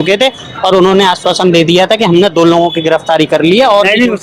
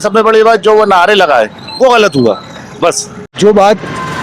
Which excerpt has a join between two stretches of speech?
second; 1 cut; at 3.3 s

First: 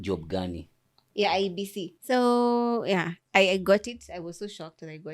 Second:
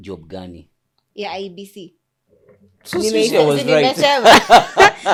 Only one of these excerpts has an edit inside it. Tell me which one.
first; 1 cut; at 1.9 s

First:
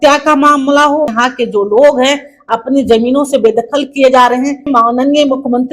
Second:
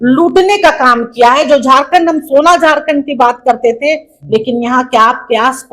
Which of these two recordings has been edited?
first; 2 cuts; at 1.1 s, 4.7 s

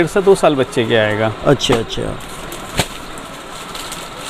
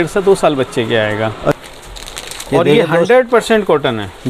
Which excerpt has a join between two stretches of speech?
second; 1 cut; at 1.5 s

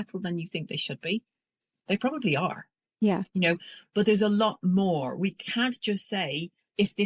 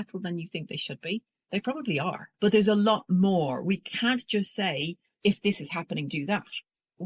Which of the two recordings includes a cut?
second; 2 cuts; at 1.3 s, 2.2 s

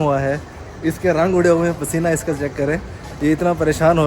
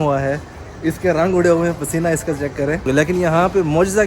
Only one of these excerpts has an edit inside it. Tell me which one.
second; 1 cut; at 2.9 s

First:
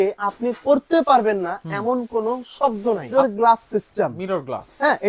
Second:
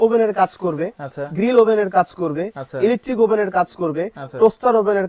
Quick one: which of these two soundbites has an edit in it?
first; 1 cut; at 3.1 s

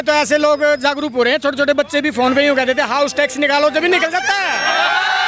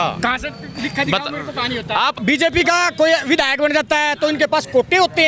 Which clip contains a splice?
second; 1 cut; at 2.2 s

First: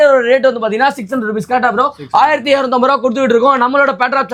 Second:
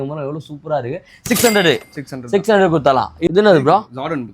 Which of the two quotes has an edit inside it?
second; 1 cut; at 3.3 s

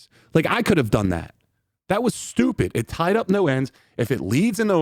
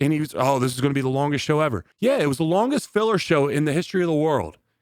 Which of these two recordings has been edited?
second; 1 cut; at 1.9 s

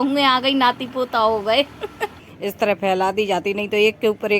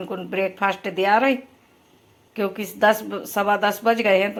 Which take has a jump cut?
first; 1 cut; at 2.0 s

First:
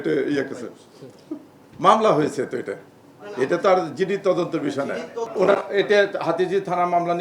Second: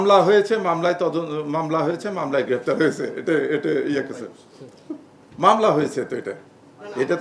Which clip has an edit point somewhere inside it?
first; 1 cut; at 5.3 s

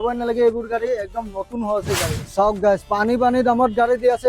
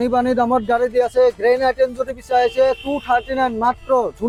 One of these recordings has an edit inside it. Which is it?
first; 1 cut; at 2.2 s

